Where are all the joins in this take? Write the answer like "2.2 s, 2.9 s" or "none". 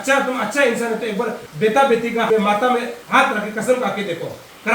1.4 s, 2.3 s, 3.0 s

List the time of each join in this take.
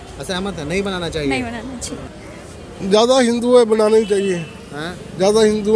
2.0 s

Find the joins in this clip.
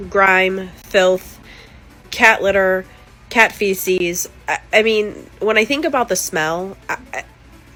none

